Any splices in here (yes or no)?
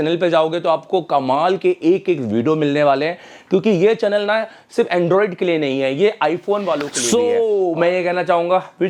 no